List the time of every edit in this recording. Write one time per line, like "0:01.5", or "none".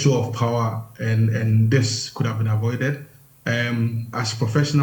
none